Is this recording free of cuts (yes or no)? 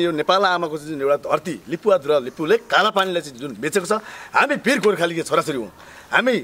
yes